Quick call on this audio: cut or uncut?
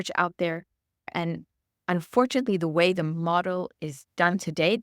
cut